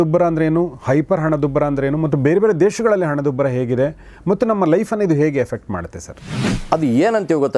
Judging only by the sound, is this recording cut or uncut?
cut